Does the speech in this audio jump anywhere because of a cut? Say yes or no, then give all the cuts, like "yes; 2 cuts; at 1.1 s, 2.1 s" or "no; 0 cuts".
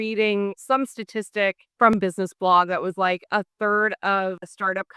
yes; 1 cut; at 1.9 s